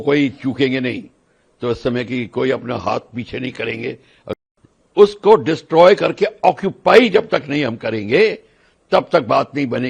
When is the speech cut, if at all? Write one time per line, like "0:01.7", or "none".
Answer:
0:04.3